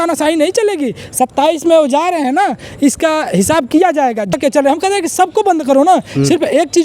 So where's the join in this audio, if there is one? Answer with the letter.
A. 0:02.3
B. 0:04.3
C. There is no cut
B